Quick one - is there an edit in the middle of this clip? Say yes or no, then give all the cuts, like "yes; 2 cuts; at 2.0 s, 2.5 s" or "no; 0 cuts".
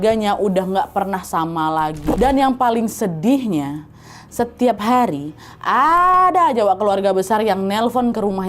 yes; 1 cut; at 2.2 s